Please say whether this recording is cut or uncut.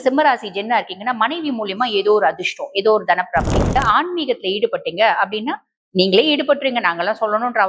cut